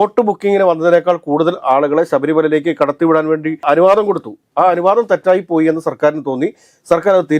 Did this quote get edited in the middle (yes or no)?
no